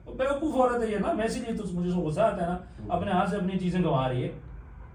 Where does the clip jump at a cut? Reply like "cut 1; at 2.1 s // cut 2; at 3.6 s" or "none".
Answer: none